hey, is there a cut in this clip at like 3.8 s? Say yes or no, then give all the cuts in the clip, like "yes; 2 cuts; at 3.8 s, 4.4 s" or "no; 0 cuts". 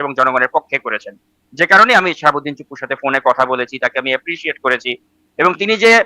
no; 0 cuts